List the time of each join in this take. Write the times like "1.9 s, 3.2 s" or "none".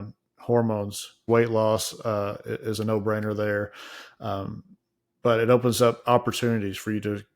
1.3 s

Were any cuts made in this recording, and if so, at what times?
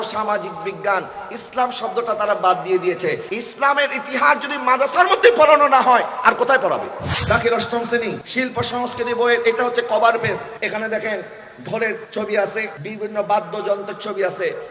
3.3 s, 7.1 s, 8.2 s, 10.5 s, 12.0 s, 12.8 s

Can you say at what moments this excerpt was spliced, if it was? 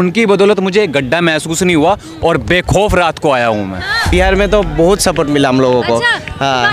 4.1 s

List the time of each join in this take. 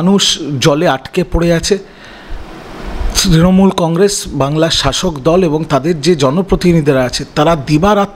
none

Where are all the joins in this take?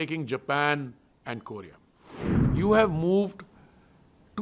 2.4 s

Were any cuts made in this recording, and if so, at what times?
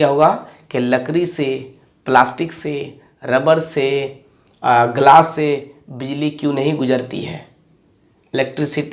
none

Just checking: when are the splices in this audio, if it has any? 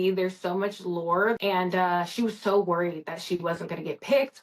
1.4 s

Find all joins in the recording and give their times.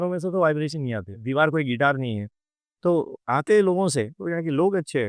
1.2 s, 4.2 s

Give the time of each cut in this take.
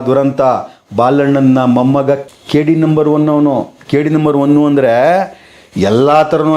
2.2 s

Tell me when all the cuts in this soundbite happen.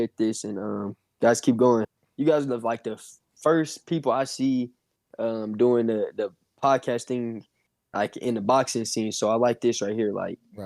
2.0 s

